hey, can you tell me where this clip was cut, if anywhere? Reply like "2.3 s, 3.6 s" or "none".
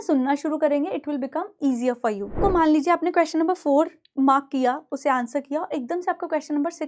2.4 s